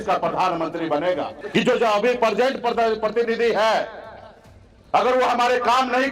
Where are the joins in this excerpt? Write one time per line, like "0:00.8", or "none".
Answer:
0:01.4